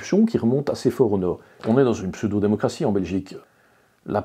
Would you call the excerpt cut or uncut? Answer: cut